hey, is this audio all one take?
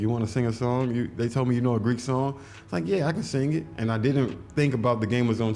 yes; 0 cuts

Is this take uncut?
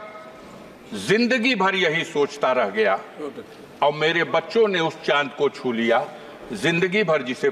yes; 0 cuts

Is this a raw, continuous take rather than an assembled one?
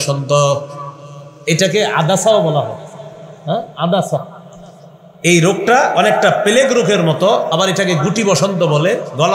yes; 0 cuts

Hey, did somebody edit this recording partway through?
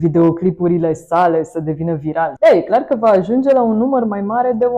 yes; 1 cut; at 2.3 s

